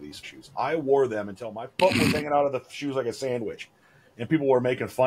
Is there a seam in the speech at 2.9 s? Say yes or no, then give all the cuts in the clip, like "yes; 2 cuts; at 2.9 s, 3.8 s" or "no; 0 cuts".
no; 1 cut; at 1.6 s